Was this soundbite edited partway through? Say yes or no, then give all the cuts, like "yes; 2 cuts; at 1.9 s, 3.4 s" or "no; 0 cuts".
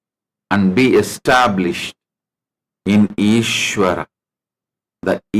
yes; 1 cut; at 1.1 s